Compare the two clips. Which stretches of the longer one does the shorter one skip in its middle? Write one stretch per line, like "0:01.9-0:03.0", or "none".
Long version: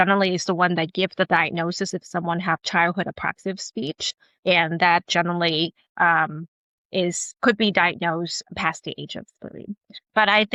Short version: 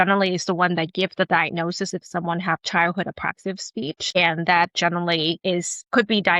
0:04.2-0:04.5
0:05.7-0:06.9